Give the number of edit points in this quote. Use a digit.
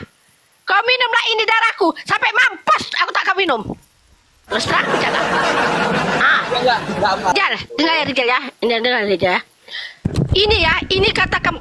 1